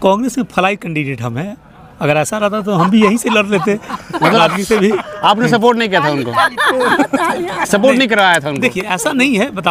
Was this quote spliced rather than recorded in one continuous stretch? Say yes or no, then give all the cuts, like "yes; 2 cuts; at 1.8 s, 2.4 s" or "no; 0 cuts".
no; 0 cuts